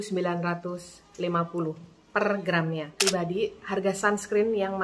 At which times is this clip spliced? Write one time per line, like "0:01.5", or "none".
0:03.0